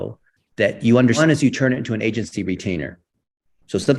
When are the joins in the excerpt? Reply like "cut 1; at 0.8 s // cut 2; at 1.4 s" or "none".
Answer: cut 1; at 1.2 s